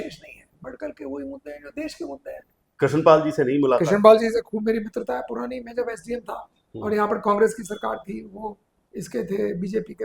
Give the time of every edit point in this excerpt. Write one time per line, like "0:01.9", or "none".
0:02.6